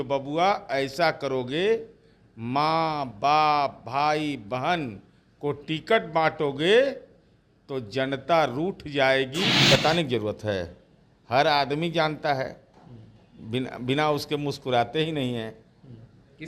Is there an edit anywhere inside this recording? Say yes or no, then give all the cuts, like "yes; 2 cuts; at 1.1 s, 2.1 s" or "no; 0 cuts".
yes; 1 cut; at 9.5 s